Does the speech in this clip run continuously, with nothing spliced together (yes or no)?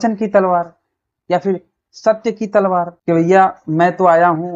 no